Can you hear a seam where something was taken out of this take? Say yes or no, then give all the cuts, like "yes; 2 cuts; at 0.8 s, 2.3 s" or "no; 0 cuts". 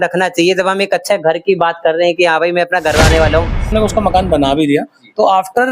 yes; 1 cut; at 3.7 s